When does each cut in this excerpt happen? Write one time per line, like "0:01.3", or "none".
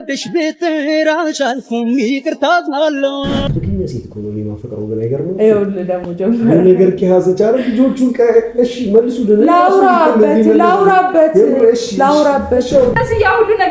0:03.4
0:13.0